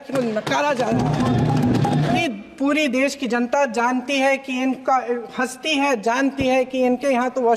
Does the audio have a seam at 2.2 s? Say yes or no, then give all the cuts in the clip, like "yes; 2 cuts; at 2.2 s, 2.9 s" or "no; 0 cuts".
yes; 1 cut; at 2.2 s